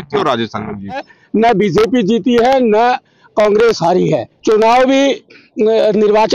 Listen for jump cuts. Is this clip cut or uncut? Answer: cut